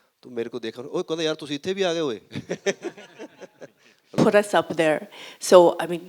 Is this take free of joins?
no; 1 cut; at 4.2 s

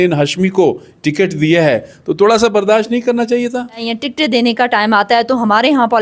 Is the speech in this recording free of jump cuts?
no; 1 cut; at 3.9 s

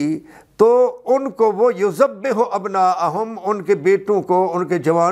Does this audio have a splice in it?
no; 0 cuts

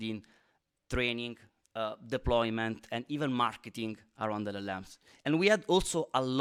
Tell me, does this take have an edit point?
no; 0 cuts

